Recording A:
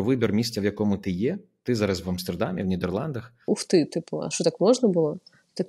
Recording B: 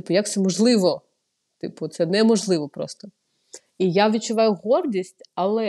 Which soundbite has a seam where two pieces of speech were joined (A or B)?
A